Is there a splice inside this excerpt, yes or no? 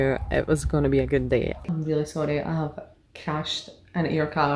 yes